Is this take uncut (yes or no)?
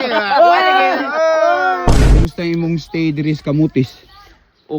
no